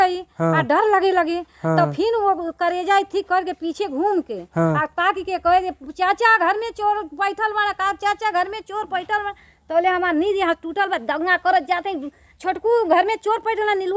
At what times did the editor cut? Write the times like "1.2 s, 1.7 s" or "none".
none

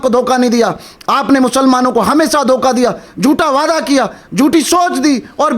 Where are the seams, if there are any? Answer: none

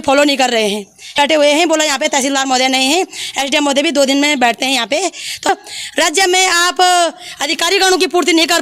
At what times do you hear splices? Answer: 1.2 s, 5.5 s

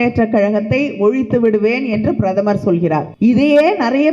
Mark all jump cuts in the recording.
3.1 s

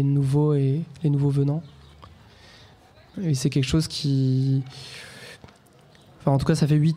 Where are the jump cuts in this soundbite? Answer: 3.0 s

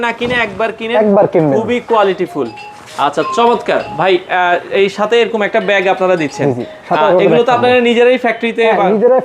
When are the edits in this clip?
none

